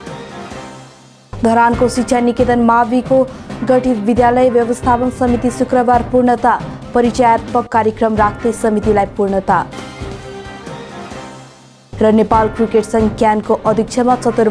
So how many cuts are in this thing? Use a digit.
1